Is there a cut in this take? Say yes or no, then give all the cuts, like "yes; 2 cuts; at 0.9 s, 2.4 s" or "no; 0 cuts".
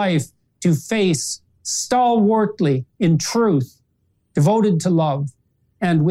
no; 0 cuts